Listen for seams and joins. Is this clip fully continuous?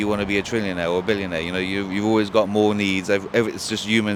yes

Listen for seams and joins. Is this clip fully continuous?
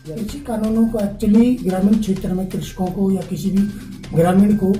yes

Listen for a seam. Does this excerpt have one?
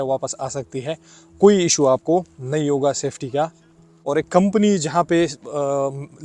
yes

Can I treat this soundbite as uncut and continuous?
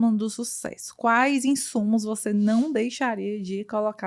yes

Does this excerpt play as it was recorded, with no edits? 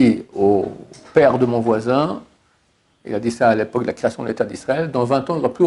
yes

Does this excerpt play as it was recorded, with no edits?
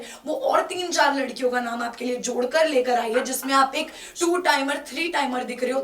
yes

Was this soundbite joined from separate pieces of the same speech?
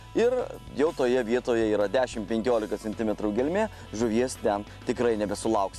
no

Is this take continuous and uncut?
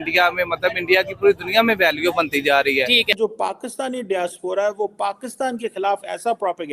no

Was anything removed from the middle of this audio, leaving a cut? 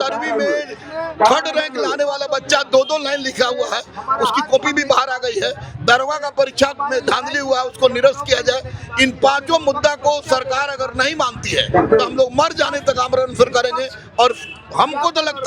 no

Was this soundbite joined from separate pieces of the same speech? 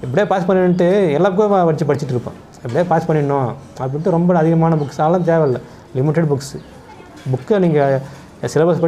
no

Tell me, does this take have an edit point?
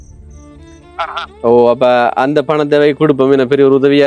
yes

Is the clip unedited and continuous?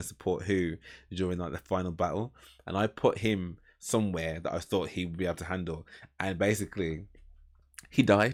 yes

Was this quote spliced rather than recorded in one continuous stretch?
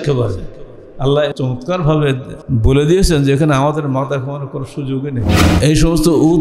yes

